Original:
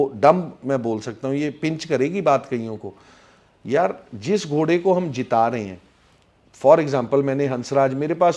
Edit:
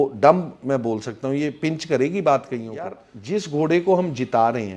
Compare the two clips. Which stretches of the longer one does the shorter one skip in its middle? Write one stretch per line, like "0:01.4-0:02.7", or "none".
0:03.1-0:04.1